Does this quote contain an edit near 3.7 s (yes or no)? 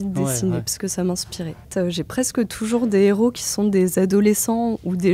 no